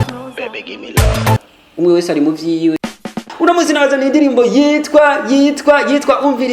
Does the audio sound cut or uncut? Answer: cut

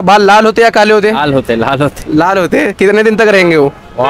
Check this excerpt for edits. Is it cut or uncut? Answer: uncut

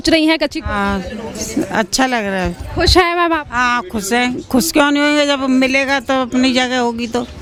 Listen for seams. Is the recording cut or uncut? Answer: uncut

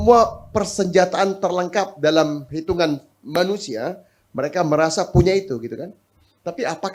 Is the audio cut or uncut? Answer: uncut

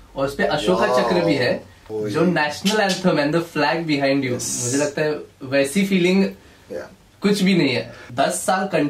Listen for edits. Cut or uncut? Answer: cut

